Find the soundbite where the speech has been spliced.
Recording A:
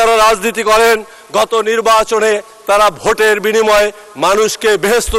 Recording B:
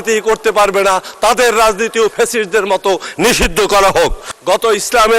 B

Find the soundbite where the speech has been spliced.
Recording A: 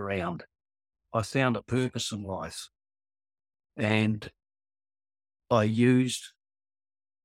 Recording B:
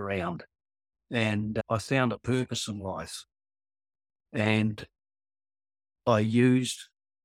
A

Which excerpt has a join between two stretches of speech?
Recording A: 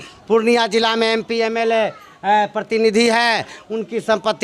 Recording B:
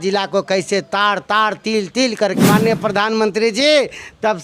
B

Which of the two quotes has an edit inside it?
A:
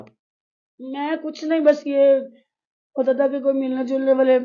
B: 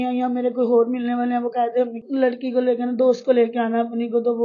B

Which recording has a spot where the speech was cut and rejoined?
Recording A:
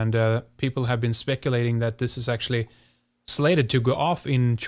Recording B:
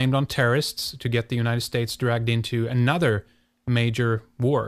A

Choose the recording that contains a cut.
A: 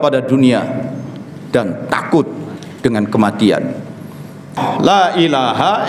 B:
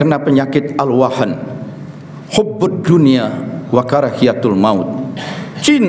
A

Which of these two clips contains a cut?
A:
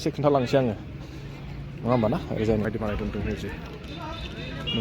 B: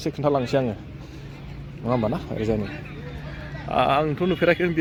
A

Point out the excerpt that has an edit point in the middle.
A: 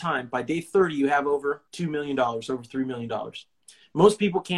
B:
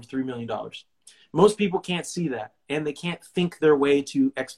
A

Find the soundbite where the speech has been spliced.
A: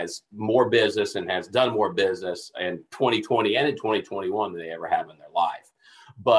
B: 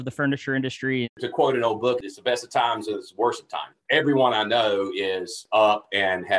B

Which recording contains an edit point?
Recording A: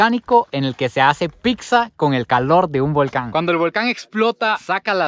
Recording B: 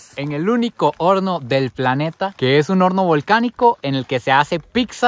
A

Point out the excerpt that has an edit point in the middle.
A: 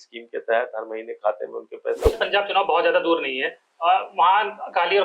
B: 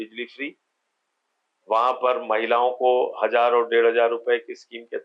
A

